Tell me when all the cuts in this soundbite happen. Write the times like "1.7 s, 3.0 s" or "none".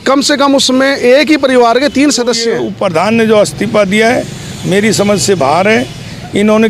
2.6 s